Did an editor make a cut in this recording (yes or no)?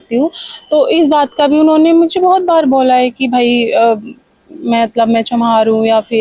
no